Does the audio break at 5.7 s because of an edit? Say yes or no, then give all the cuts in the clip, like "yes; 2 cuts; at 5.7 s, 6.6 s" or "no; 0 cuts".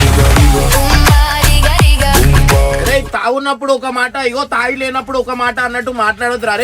no; 1 cut; at 2.8 s